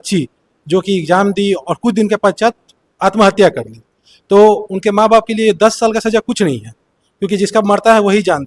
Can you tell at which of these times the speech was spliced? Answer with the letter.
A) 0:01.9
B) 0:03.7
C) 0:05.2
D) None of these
D